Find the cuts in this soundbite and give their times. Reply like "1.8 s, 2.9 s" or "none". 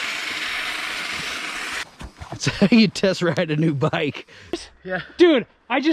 1.8 s, 4.5 s